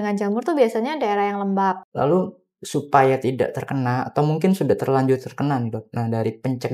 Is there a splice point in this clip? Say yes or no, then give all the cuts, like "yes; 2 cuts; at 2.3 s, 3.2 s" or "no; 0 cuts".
yes; 1 cut; at 1.9 s